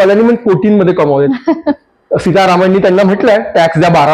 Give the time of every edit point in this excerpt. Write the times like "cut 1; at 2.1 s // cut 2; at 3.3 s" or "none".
none